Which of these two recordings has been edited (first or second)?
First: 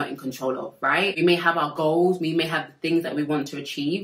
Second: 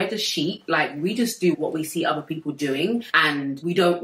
first